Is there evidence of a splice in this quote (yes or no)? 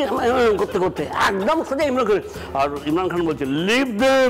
yes